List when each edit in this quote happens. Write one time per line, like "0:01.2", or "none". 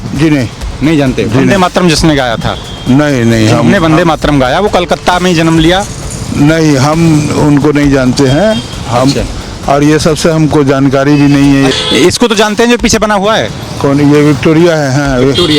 0:11.7